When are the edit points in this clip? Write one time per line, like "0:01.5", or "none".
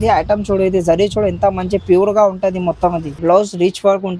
0:03.1